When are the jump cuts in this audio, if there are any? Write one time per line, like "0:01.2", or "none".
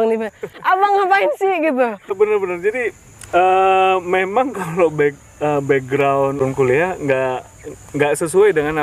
0:00.7
0:02.1
0:06.4